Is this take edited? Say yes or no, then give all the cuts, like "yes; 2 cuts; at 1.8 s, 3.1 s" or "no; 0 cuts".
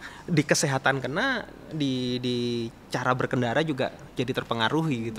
no; 0 cuts